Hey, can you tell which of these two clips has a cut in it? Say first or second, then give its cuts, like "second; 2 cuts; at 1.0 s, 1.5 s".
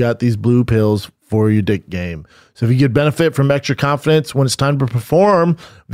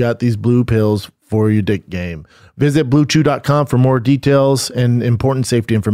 second; 1 cut; at 2.4 s